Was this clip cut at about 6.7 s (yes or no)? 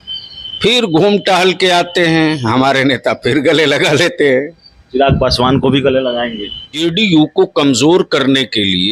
yes